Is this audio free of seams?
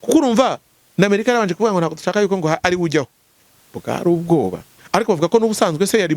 no; 1 cut; at 4.8 s

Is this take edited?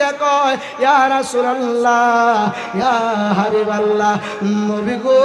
no; 0 cuts

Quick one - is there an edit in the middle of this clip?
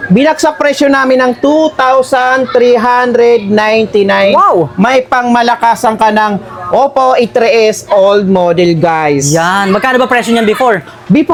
no; 0 cuts

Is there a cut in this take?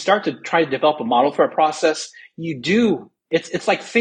no; 0 cuts

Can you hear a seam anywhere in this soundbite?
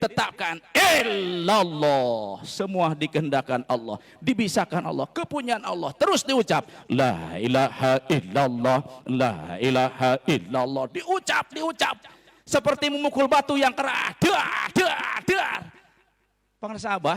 no; 0 cuts

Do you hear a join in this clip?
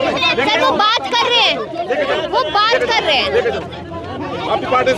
no; 0 cuts

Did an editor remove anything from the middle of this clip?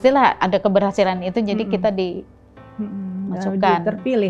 no; 0 cuts

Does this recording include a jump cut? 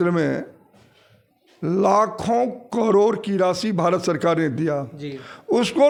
no; 0 cuts

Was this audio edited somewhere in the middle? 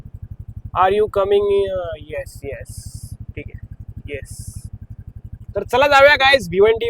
yes; 1 cut; at 5.3 s

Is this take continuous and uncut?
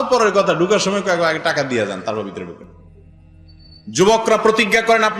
yes; 0 cuts

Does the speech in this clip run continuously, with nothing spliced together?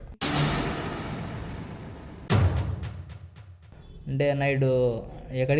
no; 1 cut; at 3.5 s

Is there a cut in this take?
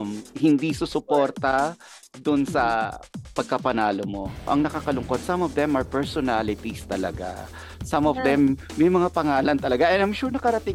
yes; 1 cut; at 4.5 s

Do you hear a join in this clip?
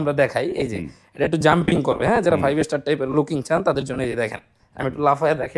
no; 0 cuts

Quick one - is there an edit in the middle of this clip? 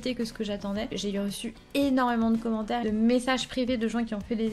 yes; 2 cuts; at 0.9 s, 2.8 s

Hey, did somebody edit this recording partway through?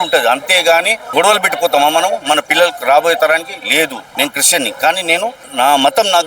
yes; 3 cuts; at 1.0 s, 4.1 s, 5.4 s

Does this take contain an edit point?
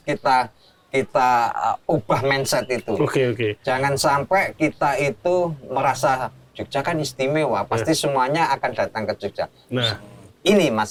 no; 0 cuts

